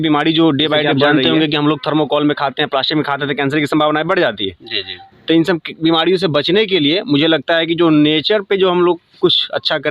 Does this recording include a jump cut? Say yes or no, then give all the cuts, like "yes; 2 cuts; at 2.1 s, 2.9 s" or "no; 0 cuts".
yes; 1 cut; at 0.9 s